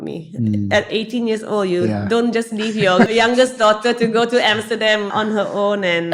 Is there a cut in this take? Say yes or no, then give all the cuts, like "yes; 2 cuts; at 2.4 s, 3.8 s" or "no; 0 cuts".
yes; 2 cuts; at 3.1 s, 5.1 s